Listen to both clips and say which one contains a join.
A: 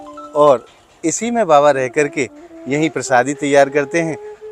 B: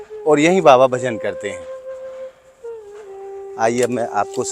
B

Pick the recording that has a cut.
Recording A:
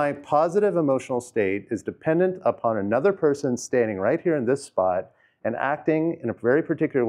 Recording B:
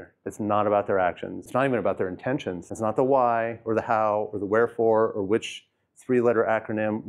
B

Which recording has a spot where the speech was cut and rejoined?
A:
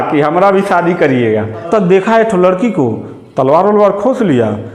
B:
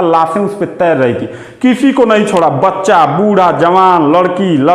A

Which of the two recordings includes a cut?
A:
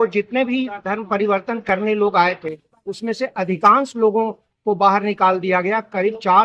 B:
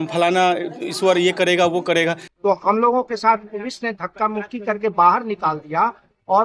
B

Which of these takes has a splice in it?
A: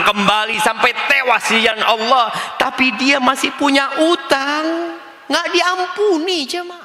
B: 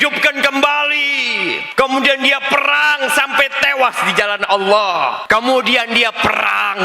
B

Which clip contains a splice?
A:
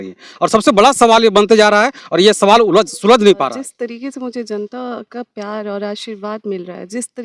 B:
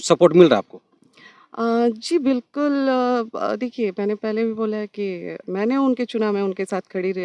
A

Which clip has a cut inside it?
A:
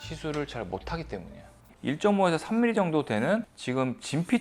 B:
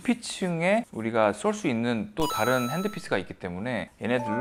A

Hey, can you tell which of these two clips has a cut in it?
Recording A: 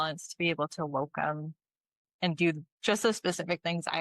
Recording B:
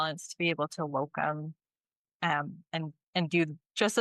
A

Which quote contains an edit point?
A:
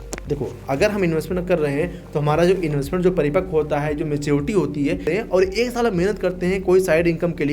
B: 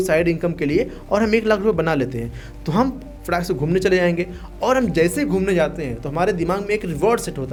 A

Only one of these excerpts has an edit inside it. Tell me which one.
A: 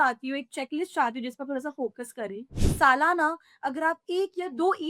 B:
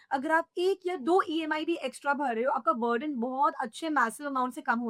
A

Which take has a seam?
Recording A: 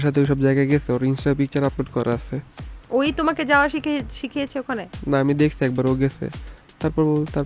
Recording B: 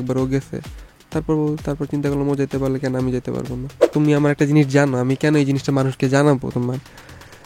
B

